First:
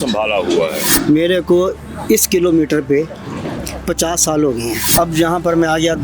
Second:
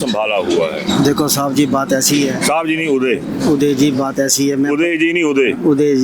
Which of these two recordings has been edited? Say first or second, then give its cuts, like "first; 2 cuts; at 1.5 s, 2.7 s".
first; 2 cuts; at 0.8 s, 4.9 s